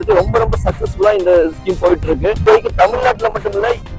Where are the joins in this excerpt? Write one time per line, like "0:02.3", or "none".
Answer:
0:02.5